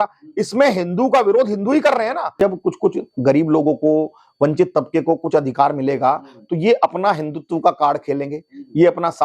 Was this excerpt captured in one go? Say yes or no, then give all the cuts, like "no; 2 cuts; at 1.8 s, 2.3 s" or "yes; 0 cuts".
no; 1 cut; at 2.3 s